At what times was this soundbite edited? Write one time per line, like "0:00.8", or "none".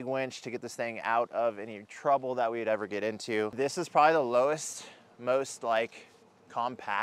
0:03.5